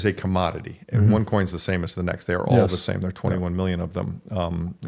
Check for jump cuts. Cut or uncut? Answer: cut